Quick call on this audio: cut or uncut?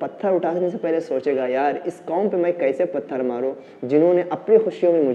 uncut